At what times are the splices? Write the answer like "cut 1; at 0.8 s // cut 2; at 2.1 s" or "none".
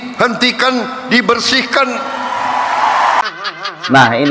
cut 1; at 3.2 s